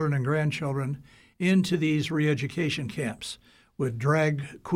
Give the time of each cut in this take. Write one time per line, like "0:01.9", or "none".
none